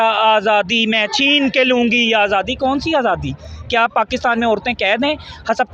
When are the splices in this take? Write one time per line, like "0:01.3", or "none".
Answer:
none